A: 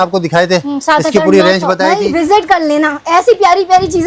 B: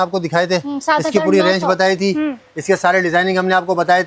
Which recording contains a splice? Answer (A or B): A